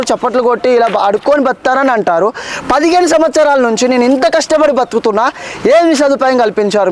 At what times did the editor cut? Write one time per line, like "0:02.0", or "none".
none